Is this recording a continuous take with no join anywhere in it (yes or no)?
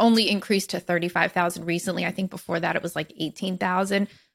yes